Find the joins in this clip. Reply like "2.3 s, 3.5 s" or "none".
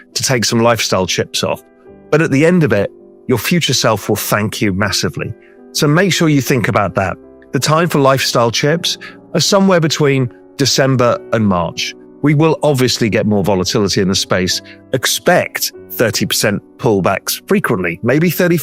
none